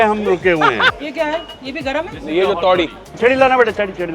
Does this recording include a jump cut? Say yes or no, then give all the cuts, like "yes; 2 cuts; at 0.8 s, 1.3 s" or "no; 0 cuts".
yes; 2 cuts; at 0.9 s, 3.1 s